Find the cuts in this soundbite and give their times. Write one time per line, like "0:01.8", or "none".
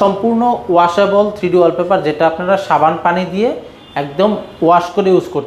none